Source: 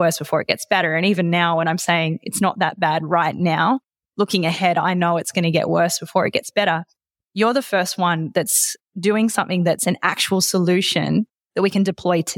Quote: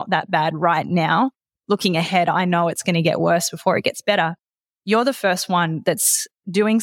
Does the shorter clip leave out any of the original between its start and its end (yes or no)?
no